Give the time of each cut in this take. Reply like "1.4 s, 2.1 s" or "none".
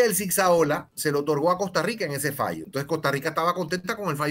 0.9 s, 2.6 s

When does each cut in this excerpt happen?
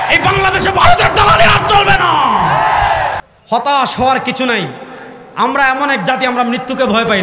3.2 s

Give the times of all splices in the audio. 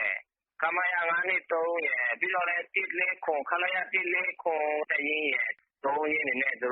1.7 s

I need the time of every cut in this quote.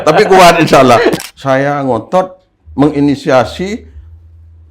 1.2 s

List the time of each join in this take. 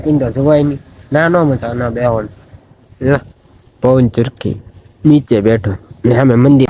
none

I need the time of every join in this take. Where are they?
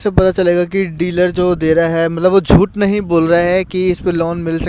none

